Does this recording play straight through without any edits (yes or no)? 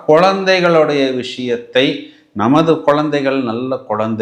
yes